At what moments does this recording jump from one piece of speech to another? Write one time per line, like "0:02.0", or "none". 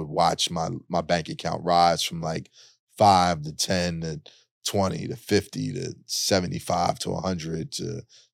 none